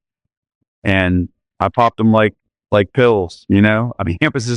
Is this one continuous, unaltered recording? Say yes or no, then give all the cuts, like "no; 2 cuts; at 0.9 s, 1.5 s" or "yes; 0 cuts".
yes; 0 cuts